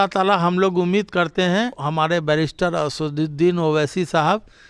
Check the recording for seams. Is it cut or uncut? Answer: cut